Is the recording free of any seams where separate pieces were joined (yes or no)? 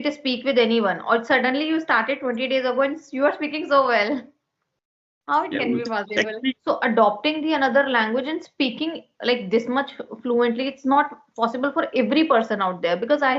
no